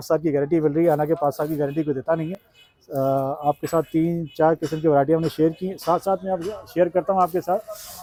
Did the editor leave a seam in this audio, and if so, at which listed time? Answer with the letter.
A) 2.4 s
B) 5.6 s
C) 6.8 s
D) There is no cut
D